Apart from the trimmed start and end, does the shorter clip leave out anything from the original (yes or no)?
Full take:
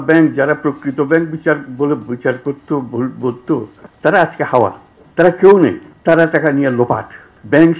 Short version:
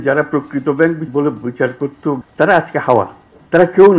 yes